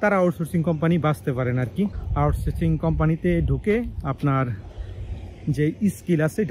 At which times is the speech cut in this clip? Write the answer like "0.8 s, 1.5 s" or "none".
none